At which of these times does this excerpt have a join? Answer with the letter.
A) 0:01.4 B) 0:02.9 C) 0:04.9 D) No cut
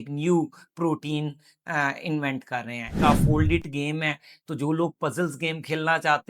B